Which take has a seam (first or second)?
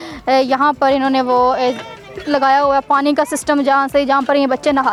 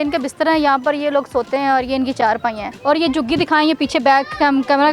second